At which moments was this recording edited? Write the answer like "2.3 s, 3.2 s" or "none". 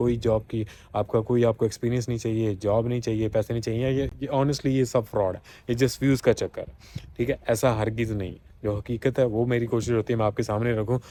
none